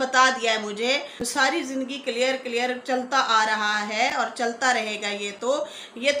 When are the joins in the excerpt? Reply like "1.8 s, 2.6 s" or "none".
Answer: 1.2 s